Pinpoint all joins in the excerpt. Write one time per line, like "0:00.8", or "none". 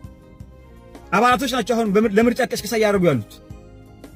none